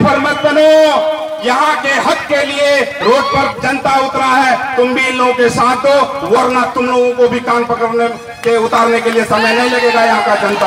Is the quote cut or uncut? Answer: uncut